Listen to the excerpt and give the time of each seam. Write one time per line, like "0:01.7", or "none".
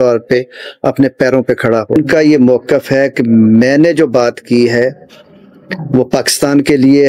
0:01.9